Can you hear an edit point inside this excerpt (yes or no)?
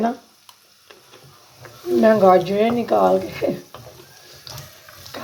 no